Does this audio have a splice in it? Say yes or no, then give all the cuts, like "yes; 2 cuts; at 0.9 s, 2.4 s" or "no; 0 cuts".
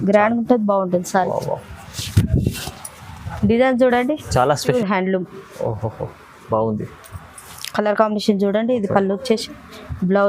yes; 1 cut; at 4.7 s